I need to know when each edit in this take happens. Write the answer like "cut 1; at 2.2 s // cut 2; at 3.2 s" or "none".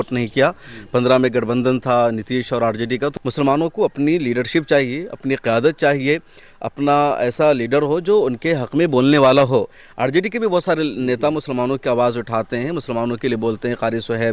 cut 1; at 3.1 s